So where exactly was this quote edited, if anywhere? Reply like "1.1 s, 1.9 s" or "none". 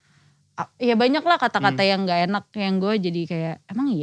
none